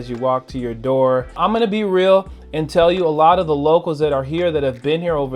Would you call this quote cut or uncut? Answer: cut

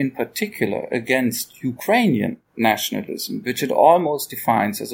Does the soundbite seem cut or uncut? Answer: uncut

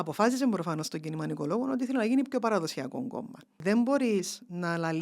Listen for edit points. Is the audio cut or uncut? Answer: cut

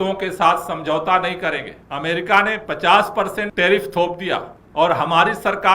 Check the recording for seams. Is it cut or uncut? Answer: cut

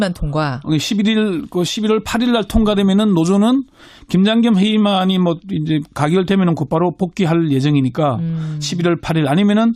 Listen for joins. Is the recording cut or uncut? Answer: cut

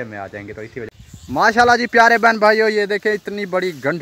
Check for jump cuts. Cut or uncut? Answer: cut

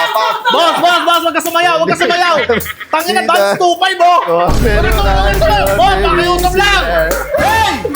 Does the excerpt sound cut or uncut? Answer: uncut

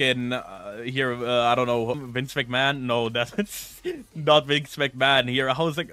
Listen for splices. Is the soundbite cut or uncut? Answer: cut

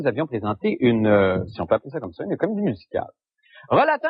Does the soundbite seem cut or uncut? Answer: uncut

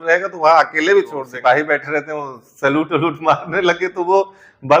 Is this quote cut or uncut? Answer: cut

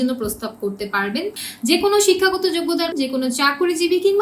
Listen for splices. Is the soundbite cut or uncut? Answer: cut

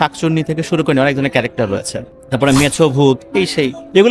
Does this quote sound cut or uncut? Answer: uncut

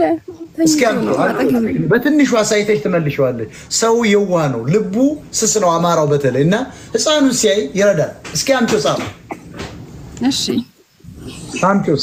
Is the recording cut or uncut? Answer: uncut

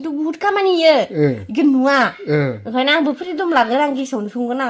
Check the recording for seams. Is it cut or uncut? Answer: uncut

